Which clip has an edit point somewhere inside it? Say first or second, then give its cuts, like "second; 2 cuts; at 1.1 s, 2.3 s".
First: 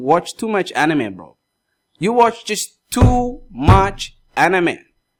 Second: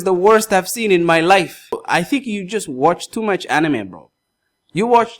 second; 1 cut; at 1.8 s